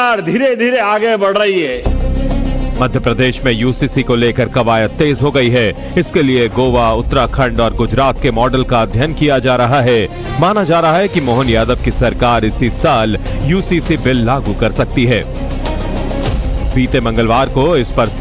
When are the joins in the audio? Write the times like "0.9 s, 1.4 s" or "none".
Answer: none